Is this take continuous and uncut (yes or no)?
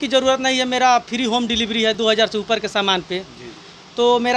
yes